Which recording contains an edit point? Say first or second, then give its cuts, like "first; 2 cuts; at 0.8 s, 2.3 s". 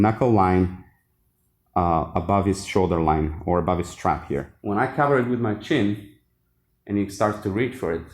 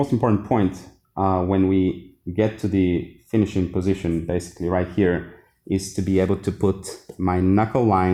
first; 1 cut; at 4.5 s